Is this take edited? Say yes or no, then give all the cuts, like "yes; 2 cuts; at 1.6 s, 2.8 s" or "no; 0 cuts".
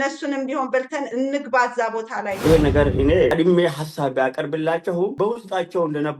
yes; 3 cuts; at 2.4 s, 3.3 s, 5.1 s